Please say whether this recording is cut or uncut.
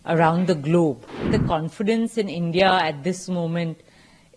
cut